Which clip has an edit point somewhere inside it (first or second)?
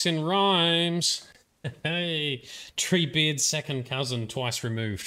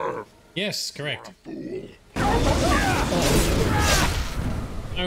second